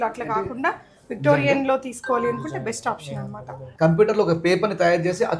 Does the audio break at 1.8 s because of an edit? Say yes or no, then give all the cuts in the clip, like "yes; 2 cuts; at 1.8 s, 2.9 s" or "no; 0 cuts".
no; 1 cut; at 3.6 s